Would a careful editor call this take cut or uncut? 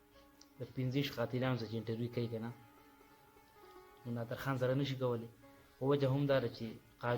cut